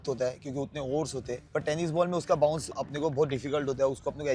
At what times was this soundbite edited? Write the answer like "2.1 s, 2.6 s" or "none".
1.4 s, 2.7 s